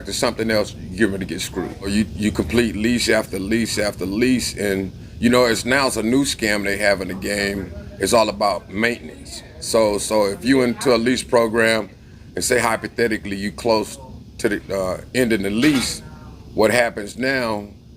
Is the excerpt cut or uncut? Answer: cut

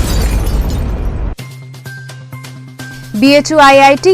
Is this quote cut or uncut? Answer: cut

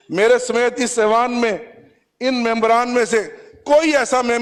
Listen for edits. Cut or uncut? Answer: uncut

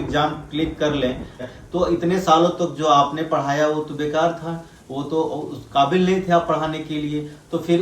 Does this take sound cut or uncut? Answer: cut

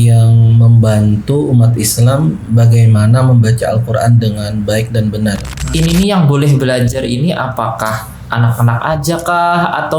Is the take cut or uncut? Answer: cut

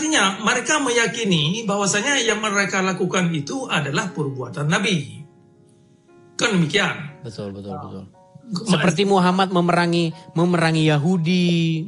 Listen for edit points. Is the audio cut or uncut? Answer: uncut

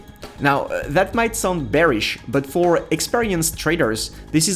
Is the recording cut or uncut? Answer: uncut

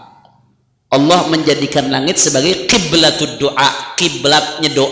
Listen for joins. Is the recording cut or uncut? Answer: uncut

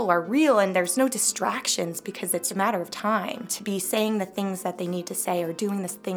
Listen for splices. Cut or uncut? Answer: cut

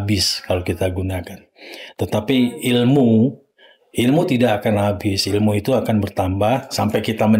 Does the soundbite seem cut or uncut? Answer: uncut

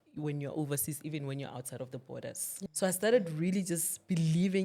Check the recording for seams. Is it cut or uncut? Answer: cut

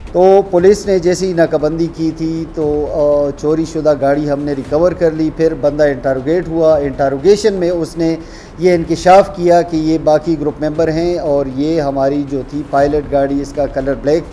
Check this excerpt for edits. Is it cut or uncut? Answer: uncut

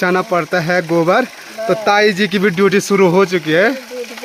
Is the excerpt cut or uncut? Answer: uncut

